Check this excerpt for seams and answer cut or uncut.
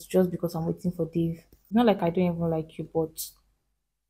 cut